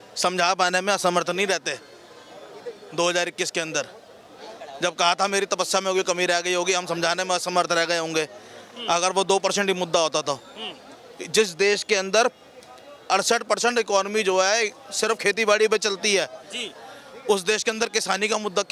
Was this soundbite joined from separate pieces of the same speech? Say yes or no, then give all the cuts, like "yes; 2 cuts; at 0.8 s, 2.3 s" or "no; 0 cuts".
no; 0 cuts